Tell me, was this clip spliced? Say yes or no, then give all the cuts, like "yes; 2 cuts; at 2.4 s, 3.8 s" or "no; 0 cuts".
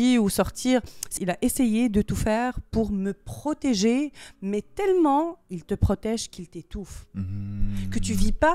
yes; 1 cut; at 1.1 s